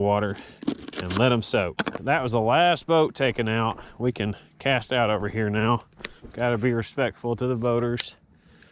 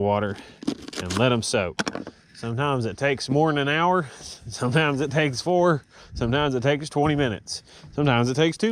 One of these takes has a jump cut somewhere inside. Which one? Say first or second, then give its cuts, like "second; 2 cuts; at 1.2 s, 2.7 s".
first; 1 cut; at 2.0 s